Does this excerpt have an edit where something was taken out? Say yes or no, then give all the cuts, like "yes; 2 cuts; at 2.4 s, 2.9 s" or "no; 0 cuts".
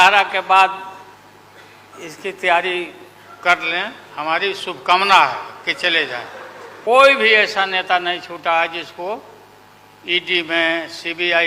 yes; 1 cut; at 6.7 s